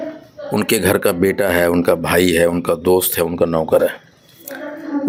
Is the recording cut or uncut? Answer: uncut